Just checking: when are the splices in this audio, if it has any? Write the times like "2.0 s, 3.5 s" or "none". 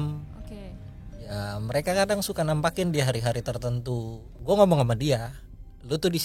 4.4 s